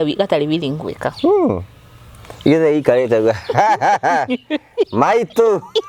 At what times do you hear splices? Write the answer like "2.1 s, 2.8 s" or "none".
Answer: none